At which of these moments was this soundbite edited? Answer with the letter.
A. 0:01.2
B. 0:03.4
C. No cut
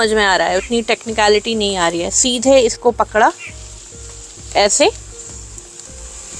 C